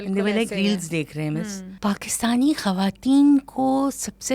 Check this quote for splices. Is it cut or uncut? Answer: cut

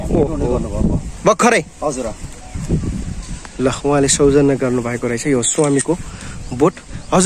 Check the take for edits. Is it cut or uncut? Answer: uncut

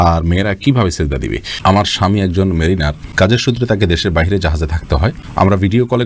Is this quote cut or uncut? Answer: cut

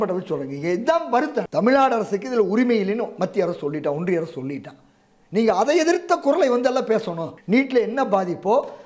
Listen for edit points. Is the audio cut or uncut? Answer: cut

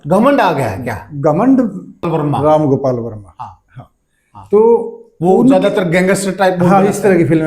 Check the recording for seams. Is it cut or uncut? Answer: cut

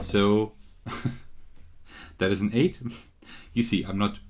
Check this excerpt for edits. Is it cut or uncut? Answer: uncut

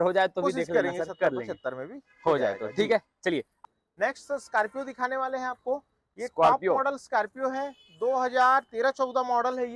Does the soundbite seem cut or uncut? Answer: uncut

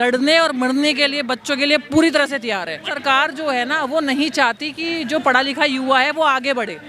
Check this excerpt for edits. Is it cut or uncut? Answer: cut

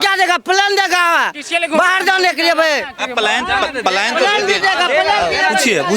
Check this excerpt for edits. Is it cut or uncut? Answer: uncut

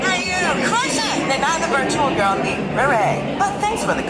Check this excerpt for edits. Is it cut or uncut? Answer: uncut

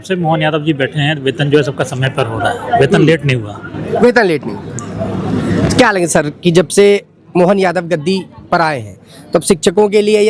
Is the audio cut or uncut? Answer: uncut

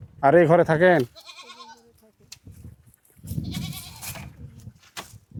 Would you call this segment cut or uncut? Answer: uncut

